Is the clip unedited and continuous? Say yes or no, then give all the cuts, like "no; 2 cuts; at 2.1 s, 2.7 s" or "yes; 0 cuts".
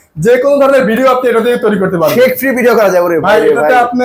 yes; 0 cuts